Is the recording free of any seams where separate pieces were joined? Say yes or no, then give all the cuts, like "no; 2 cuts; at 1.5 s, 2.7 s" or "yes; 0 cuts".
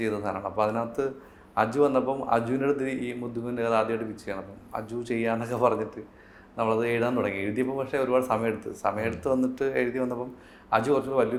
yes; 0 cuts